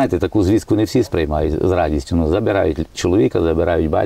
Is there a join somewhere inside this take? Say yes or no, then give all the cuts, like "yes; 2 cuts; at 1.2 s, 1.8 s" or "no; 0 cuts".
no; 0 cuts